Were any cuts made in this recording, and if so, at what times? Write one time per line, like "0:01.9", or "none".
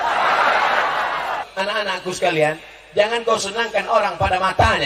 0:01.5